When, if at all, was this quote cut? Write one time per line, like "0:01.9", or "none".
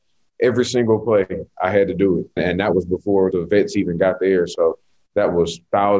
0:02.3
0:03.3